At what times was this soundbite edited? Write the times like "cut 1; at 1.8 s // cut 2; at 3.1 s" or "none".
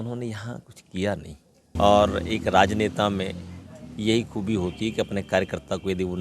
cut 1; at 1.7 s

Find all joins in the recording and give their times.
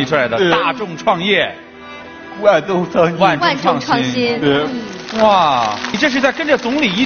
cut 1; at 5.9 s

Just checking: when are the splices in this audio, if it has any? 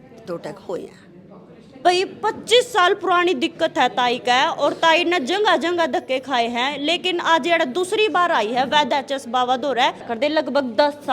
cut 1; at 1.8 s // cut 2; at 10.1 s

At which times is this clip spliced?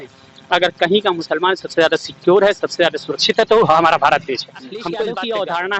cut 1; at 4.9 s

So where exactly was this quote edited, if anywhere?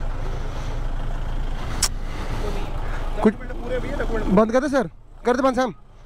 none

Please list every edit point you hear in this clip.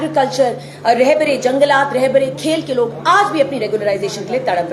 cut 1; at 1.9 s

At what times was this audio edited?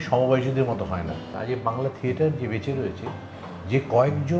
cut 1; at 1.3 s

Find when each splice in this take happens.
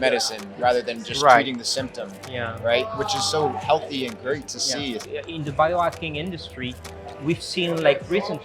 cut 1; at 5.0 s

